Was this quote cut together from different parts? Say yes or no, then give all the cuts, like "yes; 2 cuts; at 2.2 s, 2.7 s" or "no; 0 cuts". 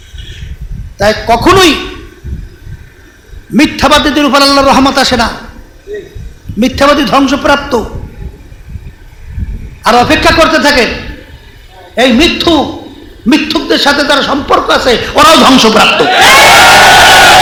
no; 0 cuts